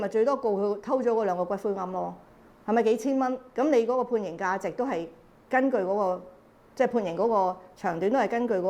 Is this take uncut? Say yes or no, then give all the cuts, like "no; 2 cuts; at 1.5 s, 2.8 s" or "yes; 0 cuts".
yes; 0 cuts